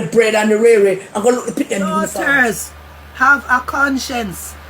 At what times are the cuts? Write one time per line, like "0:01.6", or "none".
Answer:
0:02.1